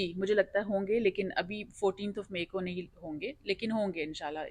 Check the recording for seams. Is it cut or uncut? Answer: uncut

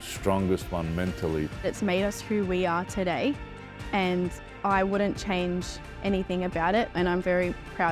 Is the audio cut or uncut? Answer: uncut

